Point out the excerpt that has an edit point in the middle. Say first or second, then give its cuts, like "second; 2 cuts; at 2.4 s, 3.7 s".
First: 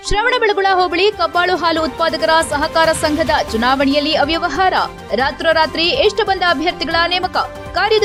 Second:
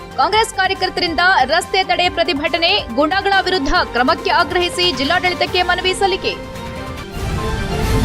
second; 1 cut; at 7.0 s